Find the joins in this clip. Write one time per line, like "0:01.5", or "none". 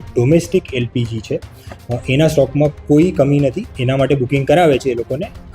0:03.7